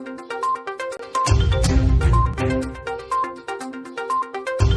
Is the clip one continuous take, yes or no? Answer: no